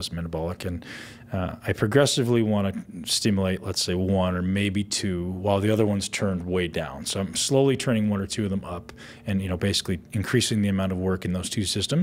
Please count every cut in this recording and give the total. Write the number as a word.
zero